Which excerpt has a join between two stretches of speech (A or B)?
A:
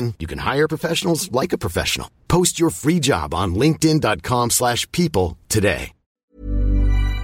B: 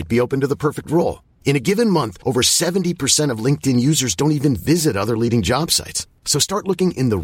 A